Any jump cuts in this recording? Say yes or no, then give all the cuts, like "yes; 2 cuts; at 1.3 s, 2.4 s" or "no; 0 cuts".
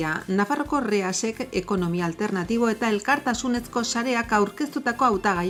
no; 0 cuts